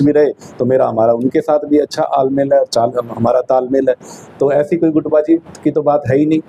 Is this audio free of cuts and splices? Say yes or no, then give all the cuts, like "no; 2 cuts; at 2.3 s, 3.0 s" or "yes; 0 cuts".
yes; 0 cuts